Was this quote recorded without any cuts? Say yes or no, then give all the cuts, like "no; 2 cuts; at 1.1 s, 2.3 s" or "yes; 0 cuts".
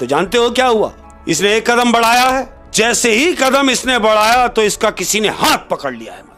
no; 2 cuts; at 1.1 s, 2.6 s